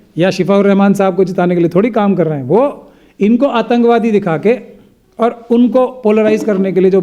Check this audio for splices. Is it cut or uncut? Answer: uncut